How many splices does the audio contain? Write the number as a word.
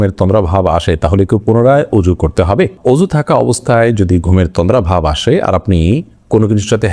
zero